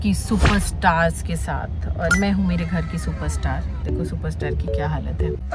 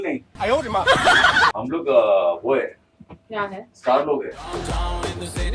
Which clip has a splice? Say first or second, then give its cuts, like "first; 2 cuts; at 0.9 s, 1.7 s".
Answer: second; 1 cut; at 4.4 s